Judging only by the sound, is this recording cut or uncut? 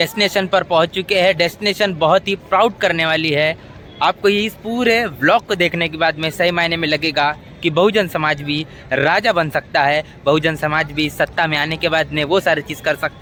uncut